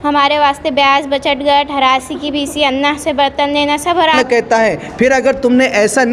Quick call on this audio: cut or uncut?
cut